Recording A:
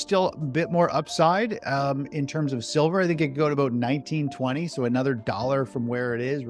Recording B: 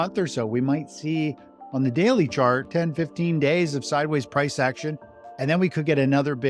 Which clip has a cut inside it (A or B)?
B